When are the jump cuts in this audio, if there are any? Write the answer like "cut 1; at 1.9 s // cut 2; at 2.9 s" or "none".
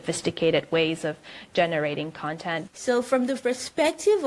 cut 1; at 2.6 s